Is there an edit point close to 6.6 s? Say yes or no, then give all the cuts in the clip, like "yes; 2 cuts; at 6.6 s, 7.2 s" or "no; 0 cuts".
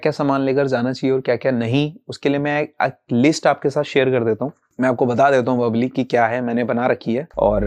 no; 0 cuts